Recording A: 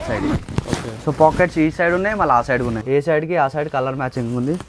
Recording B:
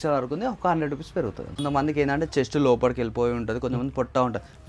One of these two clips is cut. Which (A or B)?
A